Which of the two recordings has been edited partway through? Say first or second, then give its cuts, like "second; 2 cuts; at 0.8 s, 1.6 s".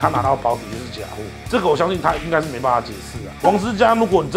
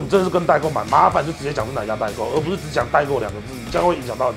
first; 2 cuts; at 1.4 s, 3.3 s